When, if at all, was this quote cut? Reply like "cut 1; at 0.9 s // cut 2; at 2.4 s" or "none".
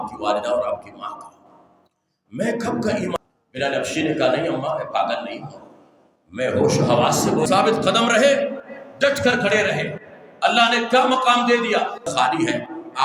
cut 1; at 3.2 s // cut 2; at 7.5 s // cut 3; at 12.1 s